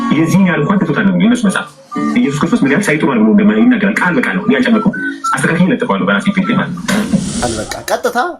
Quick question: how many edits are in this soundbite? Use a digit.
1